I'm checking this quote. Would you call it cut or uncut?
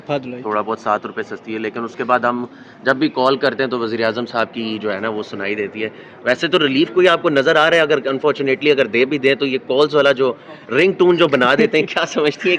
uncut